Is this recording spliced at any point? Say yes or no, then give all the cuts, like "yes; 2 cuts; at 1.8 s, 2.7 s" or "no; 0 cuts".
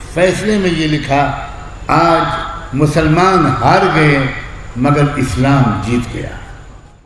no; 0 cuts